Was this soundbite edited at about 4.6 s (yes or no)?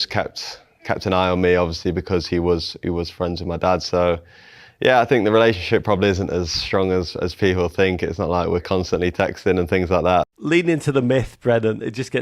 no